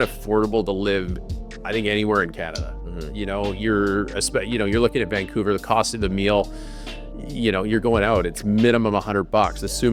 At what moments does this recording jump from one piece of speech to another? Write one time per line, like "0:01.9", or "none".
none